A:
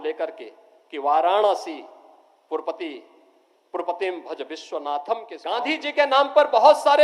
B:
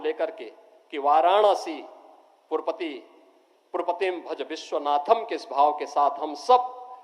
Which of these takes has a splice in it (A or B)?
A